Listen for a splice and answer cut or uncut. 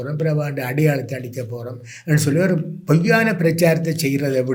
uncut